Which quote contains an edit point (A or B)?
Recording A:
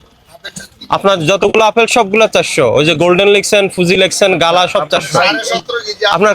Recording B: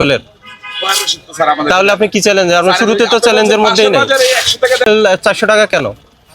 B